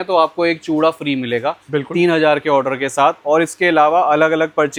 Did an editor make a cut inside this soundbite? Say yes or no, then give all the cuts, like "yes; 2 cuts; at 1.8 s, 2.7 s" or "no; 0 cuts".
no; 0 cuts